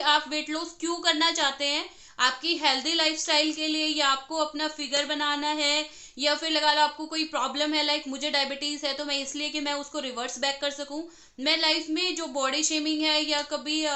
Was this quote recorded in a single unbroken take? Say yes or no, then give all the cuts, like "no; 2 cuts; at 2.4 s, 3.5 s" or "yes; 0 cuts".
yes; 0 cuts